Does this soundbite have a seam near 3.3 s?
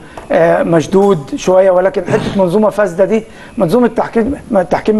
no; 0 cuts

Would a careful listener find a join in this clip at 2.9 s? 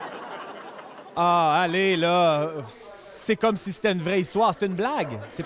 no; 1 cut; at 1.0 s

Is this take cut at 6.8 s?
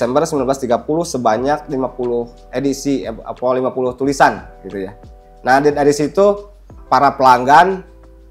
yes; 1 cut; at 6.8 s

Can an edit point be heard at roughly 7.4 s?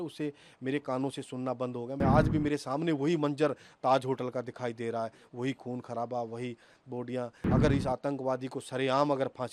yes; 2 cuts; at 2.0 s, 7.4 s

